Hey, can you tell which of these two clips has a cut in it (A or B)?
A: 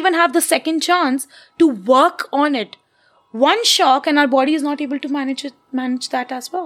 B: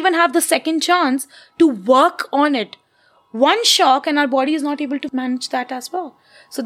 B